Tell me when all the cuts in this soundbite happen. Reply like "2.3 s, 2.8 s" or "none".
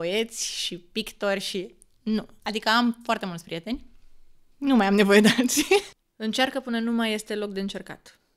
5.9 s